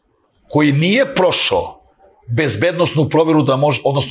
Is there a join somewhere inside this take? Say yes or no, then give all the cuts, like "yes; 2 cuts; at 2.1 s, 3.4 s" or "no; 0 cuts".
no; 0 cuts